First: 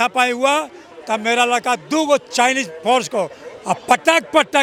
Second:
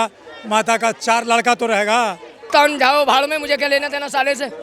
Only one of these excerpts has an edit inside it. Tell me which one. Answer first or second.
second